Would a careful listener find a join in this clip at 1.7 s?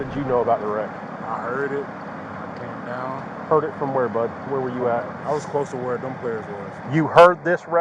no; 2 cuts; at 5.2 s, 6.8 s

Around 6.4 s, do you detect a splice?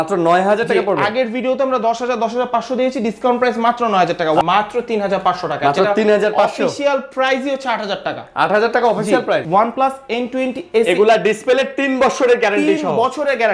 no; 2 cuts; at 4.4 s, 9.4 s

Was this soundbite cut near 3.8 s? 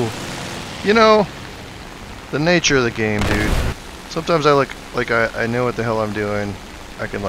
yes; 1 cut; at 3.8 s

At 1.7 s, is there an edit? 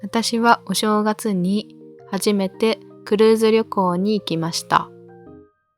no; 1 cut; at 4.9 s

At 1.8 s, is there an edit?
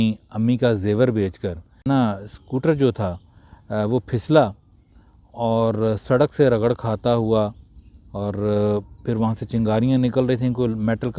yes; 1 cut; at 1.8 s

